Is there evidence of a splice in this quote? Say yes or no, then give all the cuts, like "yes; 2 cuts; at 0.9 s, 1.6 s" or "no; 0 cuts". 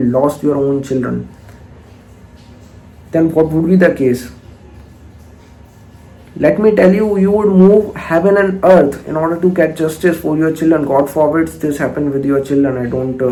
no; 0 cuts